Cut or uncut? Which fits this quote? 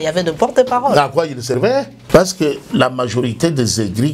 cut